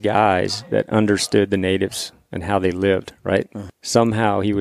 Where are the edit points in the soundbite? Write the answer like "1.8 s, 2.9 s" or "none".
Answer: 3.6 s